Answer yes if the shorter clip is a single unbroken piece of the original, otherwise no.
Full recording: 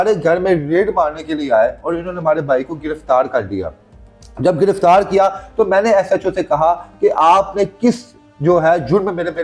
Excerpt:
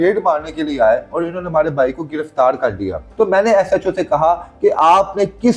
no